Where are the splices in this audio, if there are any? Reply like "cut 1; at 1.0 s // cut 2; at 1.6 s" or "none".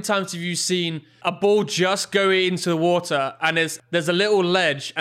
cut 1; at 1.1 s // cut 2; at 3.8 s

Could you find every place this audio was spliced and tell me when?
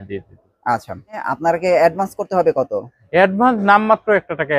cut 1; at 1.3 s

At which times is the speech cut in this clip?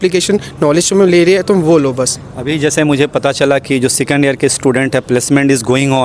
none

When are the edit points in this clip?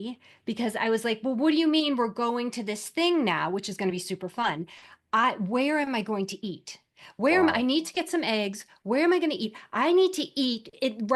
none

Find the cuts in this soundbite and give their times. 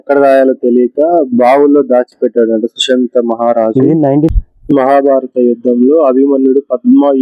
cut 1; at 4.3 s

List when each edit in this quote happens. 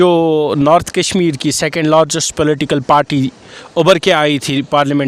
none

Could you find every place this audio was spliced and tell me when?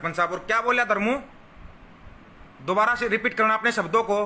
none

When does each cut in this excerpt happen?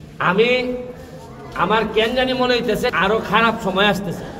cut 1; at 2.9 s

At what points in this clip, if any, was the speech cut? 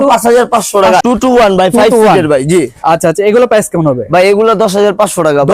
cut 1; at 1.0 s

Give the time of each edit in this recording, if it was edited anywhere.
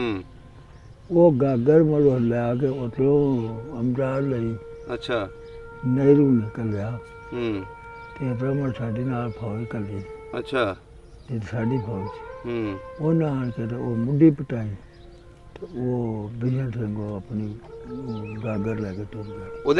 none

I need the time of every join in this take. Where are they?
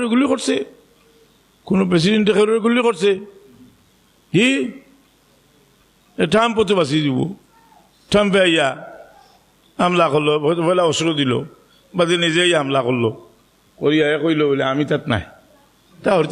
none

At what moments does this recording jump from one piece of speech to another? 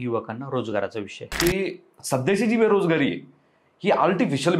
cut 1; at 1.2 s

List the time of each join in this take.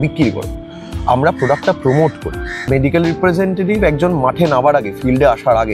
cut 1; at 2.7 s

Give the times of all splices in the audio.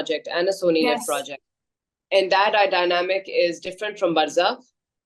none

